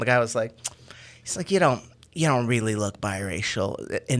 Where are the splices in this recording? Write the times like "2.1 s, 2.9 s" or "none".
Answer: none